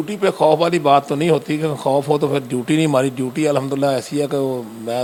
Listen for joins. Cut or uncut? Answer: uncut